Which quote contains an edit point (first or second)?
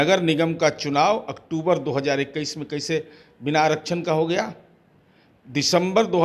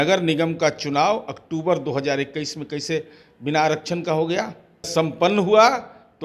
second